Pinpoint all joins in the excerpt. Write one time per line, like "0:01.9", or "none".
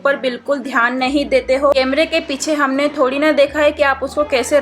0:01.7